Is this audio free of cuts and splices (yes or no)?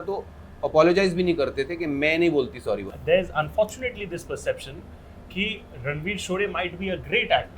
no